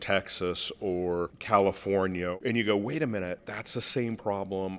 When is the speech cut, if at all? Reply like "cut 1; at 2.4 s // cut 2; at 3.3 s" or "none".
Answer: cut 1; at 1.4 s // cut 2; at 2.4 s // cut 3; at 3.4 s